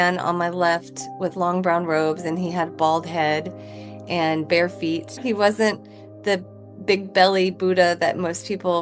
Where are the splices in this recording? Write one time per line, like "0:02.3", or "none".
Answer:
none